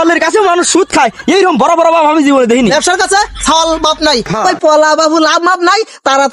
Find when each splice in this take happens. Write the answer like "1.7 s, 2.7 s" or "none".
2.7 s, 4.3 s

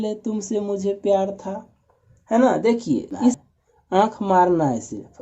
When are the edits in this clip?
3.4 s

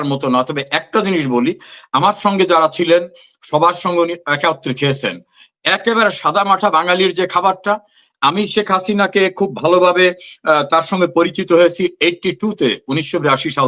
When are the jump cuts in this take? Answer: none

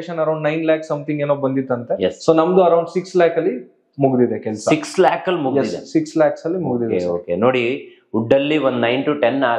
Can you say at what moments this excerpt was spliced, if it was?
none

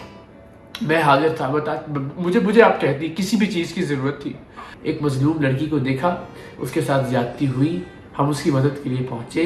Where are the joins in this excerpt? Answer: 4.7 s

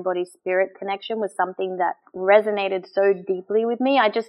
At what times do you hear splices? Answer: none

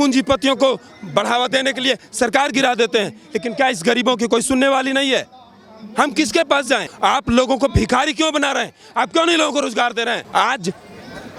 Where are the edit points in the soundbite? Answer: 6.7 s, 10.2 s

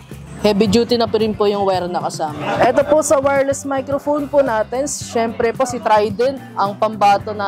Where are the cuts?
2.4 s, 6.5 s

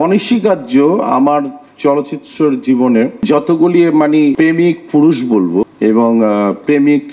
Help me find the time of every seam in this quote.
3.2 s, 4.3 s, 5.7 s

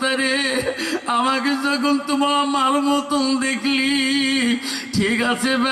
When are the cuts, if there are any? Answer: none

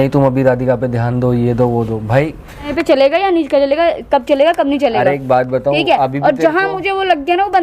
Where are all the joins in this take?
2.7 s

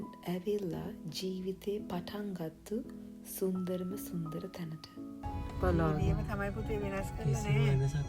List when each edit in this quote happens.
5.3 s

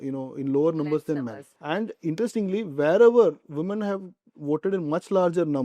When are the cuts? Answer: 1.5 s

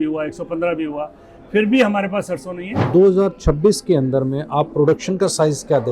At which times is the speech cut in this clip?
2.9 s

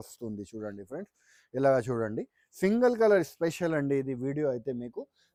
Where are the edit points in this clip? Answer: none

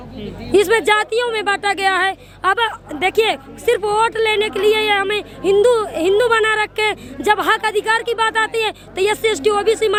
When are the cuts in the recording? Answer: none

